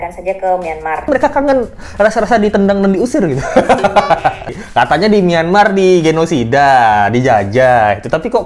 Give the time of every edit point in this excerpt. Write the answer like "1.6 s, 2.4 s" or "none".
1.1 s, 4.6 s